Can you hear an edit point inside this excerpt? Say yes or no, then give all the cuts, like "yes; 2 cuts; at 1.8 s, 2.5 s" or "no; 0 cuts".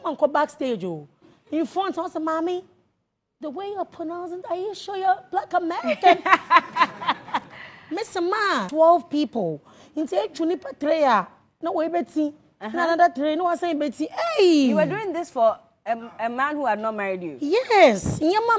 yes; 1 cut; at 8.7 s